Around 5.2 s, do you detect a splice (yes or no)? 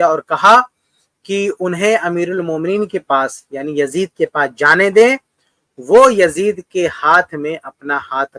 no